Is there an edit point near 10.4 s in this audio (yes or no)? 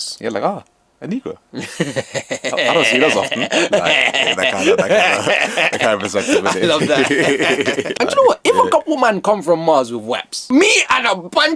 yes